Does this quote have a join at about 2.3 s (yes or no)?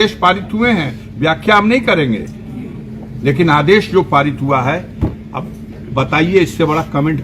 no